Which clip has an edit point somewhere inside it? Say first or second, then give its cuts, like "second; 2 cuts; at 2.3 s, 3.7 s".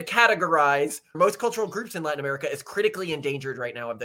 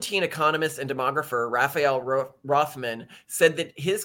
first; 1 cut; at 1.1 s